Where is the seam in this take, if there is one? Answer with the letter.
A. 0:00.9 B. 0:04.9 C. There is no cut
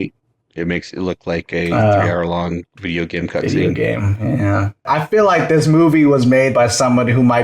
B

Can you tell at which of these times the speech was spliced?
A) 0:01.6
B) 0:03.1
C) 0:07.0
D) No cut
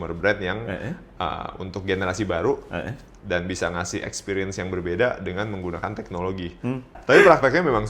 C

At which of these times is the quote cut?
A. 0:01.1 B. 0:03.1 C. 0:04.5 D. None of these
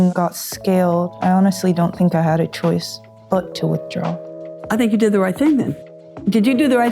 A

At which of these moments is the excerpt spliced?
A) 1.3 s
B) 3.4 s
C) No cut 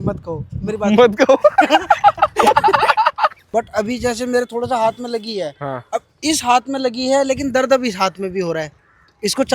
B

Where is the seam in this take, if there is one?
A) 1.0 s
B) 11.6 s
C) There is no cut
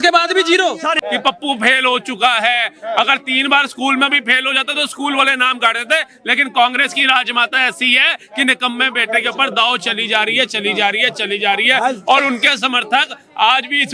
A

